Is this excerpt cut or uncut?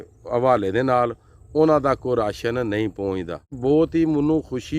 cut